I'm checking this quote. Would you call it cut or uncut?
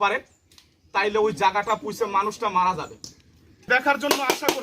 cut